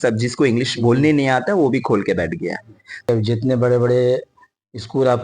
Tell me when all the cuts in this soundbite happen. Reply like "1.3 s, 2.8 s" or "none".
3.1 s